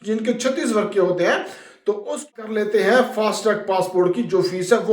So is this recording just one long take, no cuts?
no; 1 cut; at 2.4 s

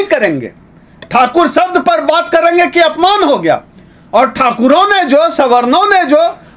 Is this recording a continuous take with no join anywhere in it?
yes; 0 cuts

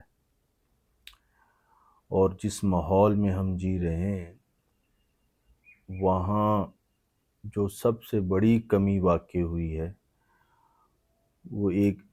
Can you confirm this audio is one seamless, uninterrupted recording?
yes; 0 cuts

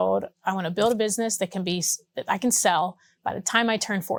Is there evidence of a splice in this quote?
no; 0 cuts

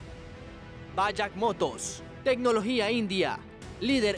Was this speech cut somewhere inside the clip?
yes; 1 cut; at 0.9 s

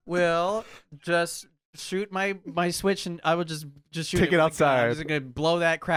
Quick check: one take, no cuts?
yes; 0 cuts

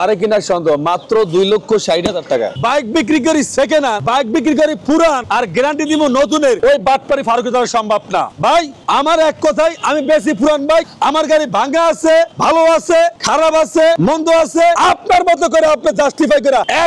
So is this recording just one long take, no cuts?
no; 5 cuts; at 2.5 s, 4.0 s, 5.2 s, 6.6 s, 8.6 s

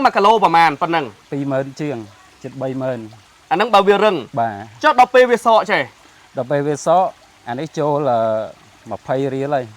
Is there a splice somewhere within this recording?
yes; 1 cut; at 1.2 s

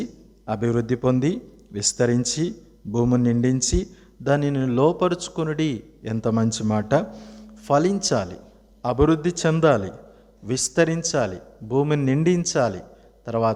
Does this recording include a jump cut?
no; 0 cuts

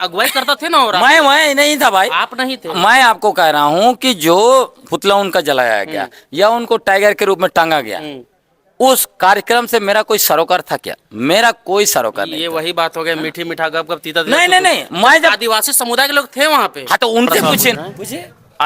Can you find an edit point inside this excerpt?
yes; 1 cut; at 17.7 s

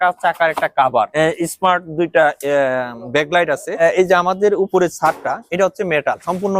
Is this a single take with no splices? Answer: no; 2 cuts; at 1.1 s, 3.8 s

